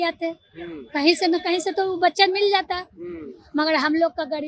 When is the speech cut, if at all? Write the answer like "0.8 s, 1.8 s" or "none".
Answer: none